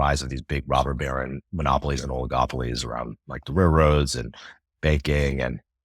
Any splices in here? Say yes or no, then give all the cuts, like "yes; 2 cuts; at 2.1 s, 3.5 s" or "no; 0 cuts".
yes; 1 cut; at 1.4 s